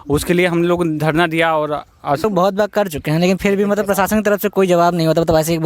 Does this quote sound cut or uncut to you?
cut